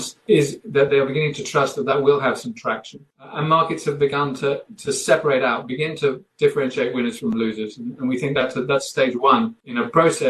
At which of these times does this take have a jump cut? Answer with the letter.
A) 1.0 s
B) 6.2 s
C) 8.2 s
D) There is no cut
D